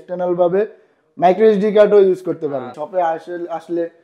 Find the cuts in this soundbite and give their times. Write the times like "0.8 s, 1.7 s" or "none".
2.8 s